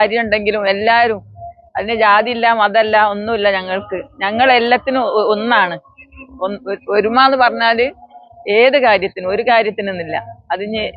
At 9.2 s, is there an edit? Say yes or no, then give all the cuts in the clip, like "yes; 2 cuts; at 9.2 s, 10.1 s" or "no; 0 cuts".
no; 0 cuts